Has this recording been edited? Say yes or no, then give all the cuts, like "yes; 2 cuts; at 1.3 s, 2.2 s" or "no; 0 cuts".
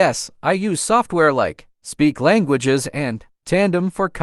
yes; 1 cut; at 1.7 s